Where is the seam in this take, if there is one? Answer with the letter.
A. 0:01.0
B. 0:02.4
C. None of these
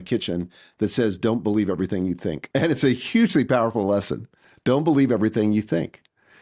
B